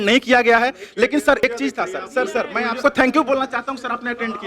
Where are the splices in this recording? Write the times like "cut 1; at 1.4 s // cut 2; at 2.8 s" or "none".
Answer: cut 1; at 1.4 s // cut 2; at 2.8 s